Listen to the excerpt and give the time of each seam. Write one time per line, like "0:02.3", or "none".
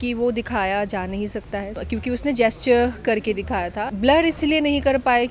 0:01.8
0:03.9